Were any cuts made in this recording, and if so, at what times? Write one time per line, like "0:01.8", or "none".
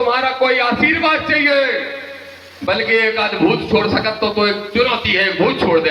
none